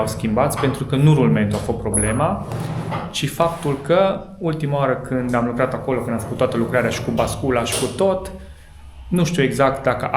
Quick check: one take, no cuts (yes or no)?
yes